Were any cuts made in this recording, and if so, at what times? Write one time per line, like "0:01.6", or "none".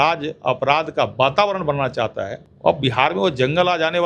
0:02.4